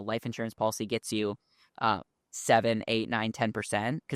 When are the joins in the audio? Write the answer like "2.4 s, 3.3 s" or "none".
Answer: none